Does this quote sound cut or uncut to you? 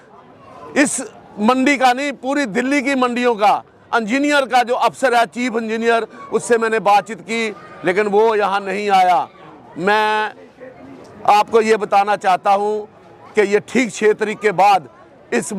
uncut